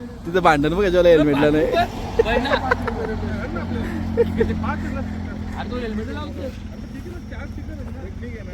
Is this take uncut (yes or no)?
yes